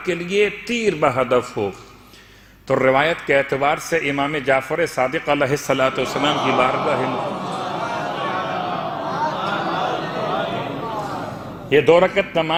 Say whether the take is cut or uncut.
uncut